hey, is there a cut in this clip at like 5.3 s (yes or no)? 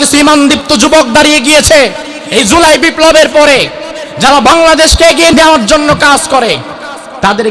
yes